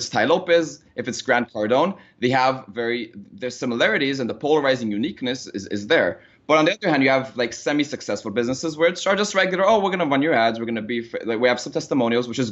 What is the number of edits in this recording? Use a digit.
0